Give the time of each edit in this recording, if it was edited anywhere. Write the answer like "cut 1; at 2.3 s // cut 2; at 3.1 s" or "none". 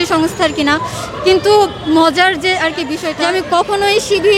cut 1; at 3.0 s